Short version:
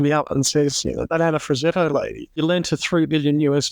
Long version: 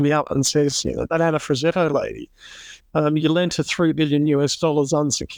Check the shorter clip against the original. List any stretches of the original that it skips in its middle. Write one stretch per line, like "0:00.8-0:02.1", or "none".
0:02.4-0:03.2